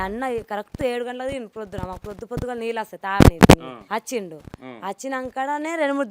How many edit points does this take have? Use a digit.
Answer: 1